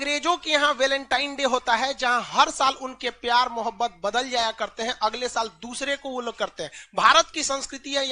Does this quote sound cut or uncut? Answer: uncut